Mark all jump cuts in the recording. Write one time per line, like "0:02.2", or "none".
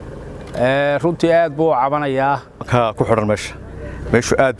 0:02.7

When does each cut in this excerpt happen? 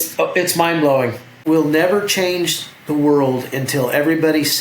0:01.4

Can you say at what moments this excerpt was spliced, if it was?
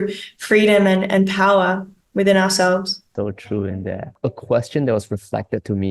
none

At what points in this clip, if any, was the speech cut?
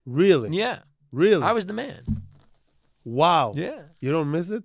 0:02.8

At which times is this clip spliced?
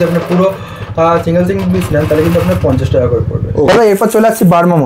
0:03.7

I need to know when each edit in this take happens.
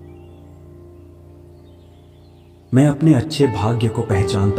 none

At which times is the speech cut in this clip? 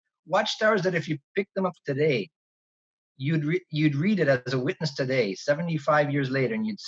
none

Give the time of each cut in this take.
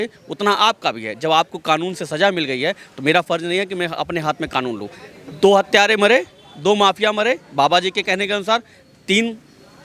none

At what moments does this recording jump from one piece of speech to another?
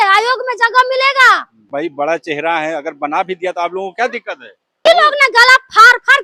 0:01.7
0:04.8

